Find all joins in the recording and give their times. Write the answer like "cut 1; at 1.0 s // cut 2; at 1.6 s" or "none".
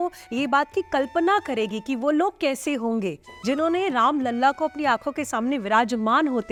none

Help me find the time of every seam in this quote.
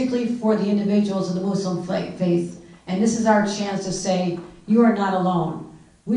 none

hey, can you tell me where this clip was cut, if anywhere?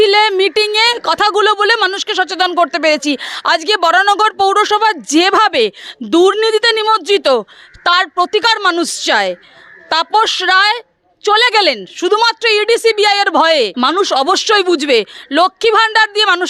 cut 1; at 13.7 s

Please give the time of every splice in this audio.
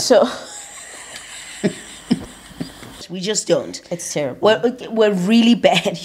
cut 1; at 3.0 s

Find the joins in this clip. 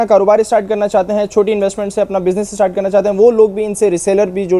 none

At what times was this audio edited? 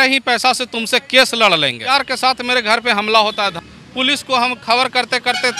cut 1; at 1.9 s // cut 2; at 3.5 s

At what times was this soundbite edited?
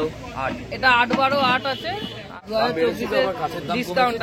cut 1; at 2.4 s

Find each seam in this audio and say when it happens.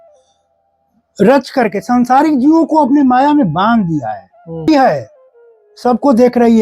cut 1; at 4.7 s

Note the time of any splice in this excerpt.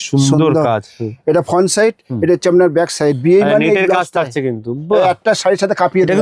none

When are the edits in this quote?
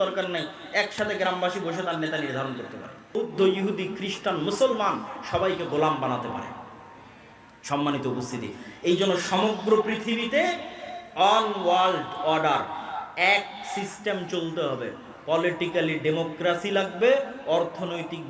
cut 1; at 3.1 s

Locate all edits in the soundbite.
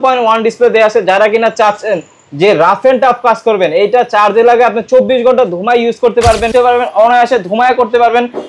cut 1; at 6.5 s

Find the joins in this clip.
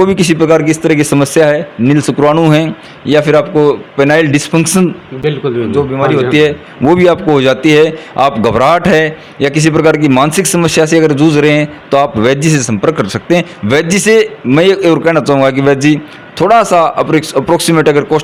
none

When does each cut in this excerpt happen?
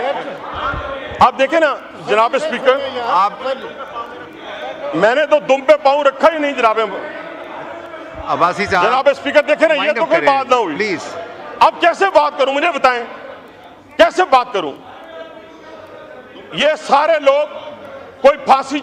none

